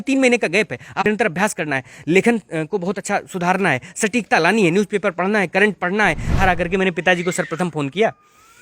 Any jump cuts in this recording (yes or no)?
yes